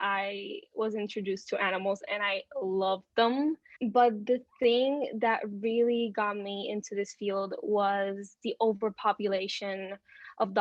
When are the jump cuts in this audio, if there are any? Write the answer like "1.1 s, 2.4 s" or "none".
3.7 s

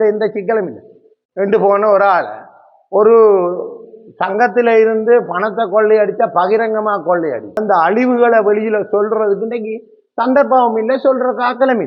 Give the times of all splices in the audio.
7.6 s

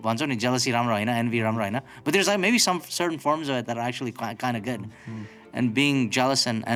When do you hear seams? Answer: none

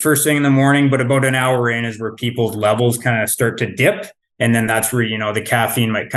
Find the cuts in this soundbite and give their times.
none

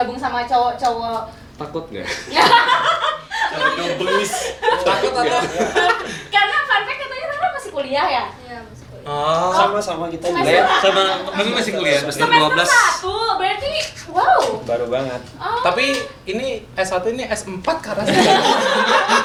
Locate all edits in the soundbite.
none

